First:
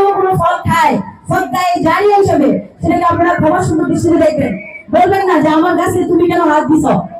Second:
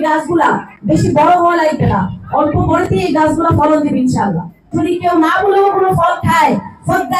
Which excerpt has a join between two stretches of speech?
second; 1 cut; at 4.6 s

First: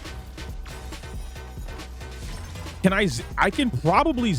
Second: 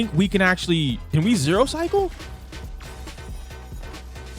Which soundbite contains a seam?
second; 1 cut; at 1.0 s

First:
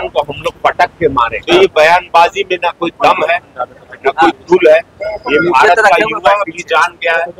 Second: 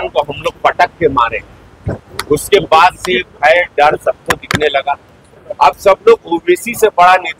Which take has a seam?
first; 1 cut; at 1.4 s

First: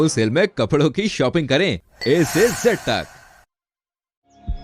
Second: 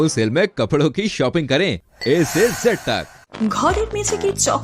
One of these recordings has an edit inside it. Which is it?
second; 1 cut; at 3.2 s

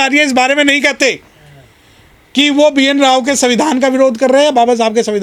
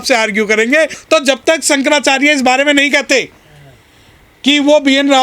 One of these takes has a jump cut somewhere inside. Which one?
second; 1 cut; at 1.0 s

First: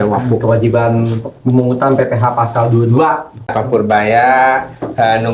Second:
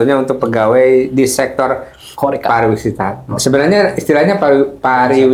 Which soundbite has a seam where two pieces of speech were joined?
first; 1 cut; at 3.5 s

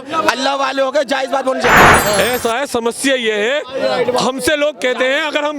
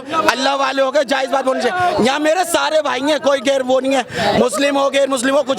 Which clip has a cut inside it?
first; 1 cut; at 1.9 s

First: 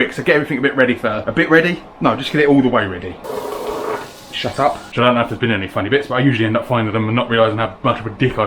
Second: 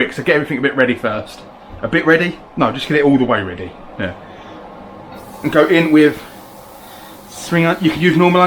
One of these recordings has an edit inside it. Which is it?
first; 3 cuts; at 1.2 s, 3.2 s, 4.8 s

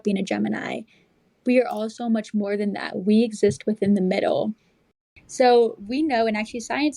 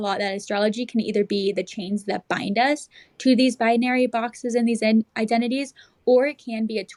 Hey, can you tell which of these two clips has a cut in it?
first; 1 cut; at 5.0 s

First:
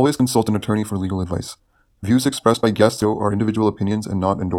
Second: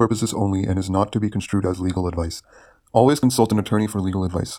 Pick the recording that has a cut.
first; 1 cut; at 3.0 s

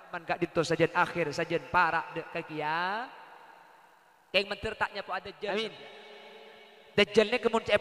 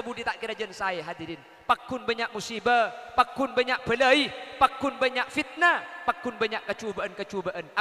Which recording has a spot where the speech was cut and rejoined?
first; 1 cut; at 5.5 s

